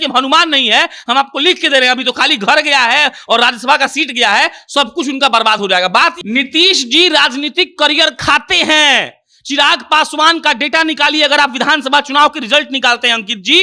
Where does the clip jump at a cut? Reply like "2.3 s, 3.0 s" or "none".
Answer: 6.2 s

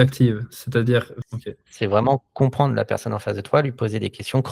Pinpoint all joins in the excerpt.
1.1 s

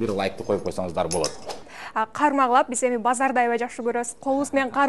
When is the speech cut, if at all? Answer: 1.8 s

